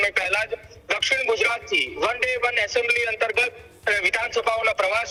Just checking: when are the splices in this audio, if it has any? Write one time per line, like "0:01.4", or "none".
none